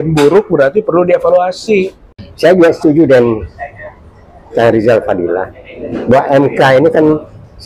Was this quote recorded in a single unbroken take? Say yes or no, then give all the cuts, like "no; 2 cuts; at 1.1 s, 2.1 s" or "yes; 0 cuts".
no; 1 cut; at 2.0 s